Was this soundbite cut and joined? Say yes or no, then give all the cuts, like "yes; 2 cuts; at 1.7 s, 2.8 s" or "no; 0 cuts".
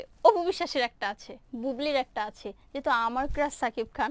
no; 0 cuts